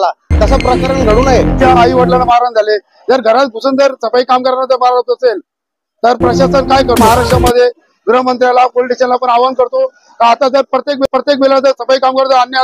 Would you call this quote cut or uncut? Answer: cut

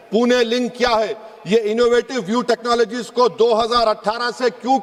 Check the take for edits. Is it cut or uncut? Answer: uncut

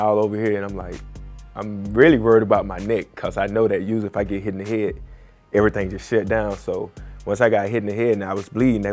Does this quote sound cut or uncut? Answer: uncut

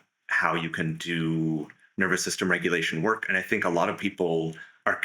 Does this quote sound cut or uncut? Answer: uncut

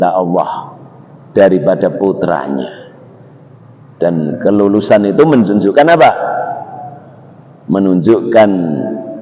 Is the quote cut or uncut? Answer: uncut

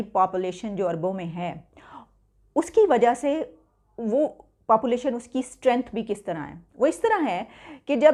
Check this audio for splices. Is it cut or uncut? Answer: uncut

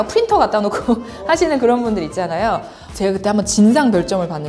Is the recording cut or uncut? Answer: cut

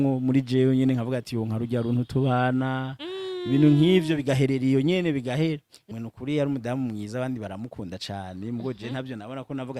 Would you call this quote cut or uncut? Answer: cut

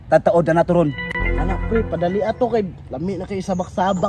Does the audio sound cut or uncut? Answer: uncut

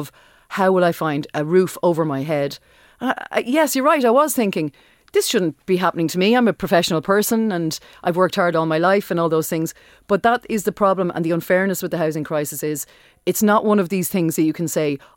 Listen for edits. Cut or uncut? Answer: cut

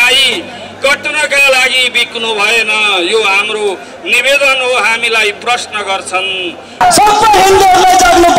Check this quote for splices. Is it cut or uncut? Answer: cut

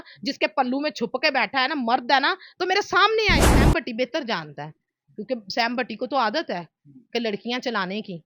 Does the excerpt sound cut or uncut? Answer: cut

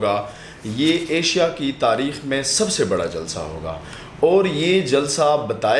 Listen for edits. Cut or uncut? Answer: uncut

